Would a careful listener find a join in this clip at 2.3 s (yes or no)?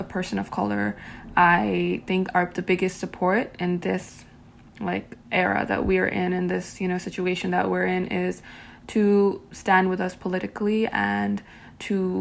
no